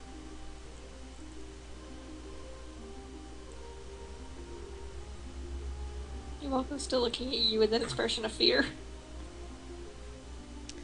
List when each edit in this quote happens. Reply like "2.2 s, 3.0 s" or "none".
none